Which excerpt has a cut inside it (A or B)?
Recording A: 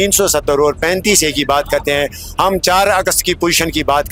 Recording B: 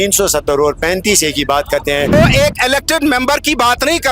B